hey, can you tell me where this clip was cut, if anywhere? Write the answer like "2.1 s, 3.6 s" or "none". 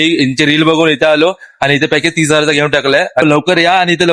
3.2 s